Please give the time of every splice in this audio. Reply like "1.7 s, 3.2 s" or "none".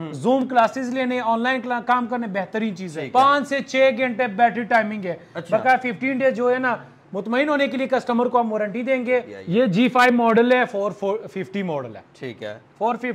2.9 s, 9.4 s